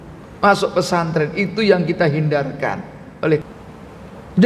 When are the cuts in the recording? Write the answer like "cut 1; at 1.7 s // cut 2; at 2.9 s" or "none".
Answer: cut 1; at 3.4 s

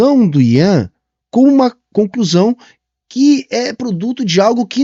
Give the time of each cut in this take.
none

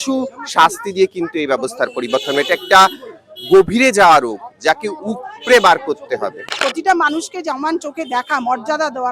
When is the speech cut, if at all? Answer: cut 1; at 6.5 s

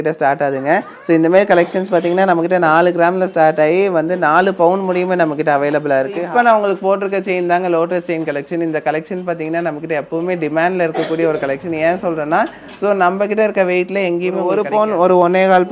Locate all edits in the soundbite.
cut 1; at 6.2 s // cut 2; at 14.6 s

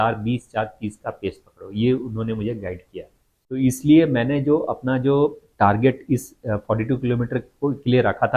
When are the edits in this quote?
cut 1; at 3.6 s

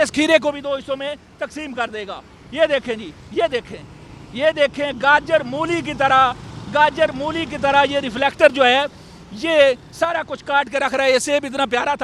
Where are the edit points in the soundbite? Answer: none

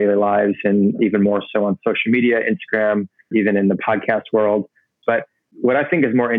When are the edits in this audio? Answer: cut 1; at 1.0 s // cut 2; at 3.3 s // cut 3; at 5.4 s

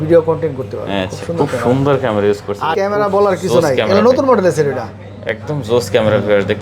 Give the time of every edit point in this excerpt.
cut 1; at 2.7 s

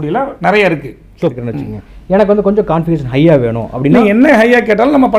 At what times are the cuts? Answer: cut 1; at 1.4 s

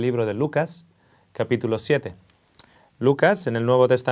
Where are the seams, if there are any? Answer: cut 1; at 3.0 s

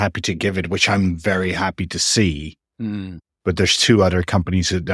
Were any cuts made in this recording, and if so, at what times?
cut 1; at 3.1 s

